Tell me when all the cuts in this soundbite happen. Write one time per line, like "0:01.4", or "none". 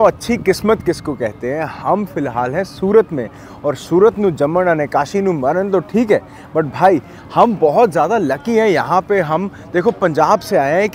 none